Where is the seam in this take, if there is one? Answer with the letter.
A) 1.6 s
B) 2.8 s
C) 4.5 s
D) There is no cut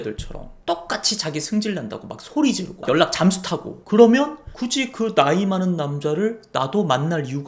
B